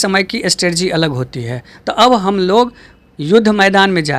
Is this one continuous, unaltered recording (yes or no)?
yes